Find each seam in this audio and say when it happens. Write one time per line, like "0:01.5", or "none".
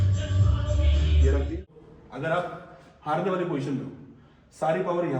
0:01.9